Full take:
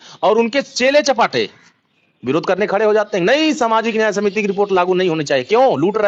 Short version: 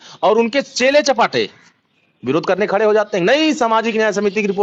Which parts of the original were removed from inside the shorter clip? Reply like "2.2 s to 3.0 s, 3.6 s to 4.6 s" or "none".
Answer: none